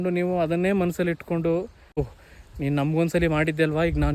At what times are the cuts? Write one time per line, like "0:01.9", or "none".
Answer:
0:02.1